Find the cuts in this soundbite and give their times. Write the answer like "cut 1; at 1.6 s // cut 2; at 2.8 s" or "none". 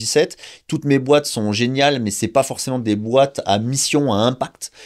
none